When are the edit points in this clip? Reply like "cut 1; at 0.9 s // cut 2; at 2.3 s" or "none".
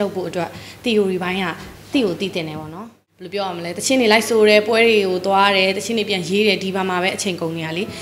cut 1; at 3.0 s